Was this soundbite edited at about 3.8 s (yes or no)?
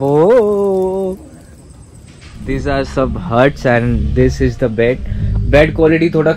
no